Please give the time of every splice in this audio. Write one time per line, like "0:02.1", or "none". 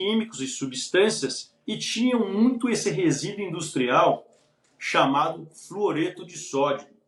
none